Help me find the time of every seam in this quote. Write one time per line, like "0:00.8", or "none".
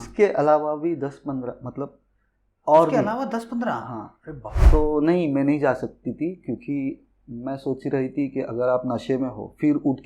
0:04.5

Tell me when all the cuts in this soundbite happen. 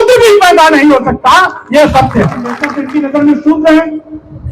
0:02.8

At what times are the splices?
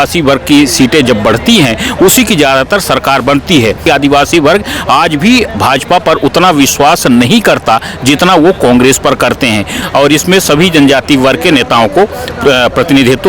0:03.8
0:09.8

